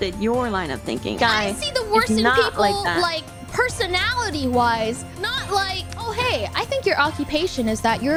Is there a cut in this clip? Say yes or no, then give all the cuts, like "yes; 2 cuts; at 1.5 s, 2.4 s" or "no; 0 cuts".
no; 0 cuts